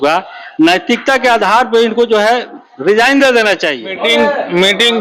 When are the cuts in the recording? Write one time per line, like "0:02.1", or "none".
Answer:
0:03.9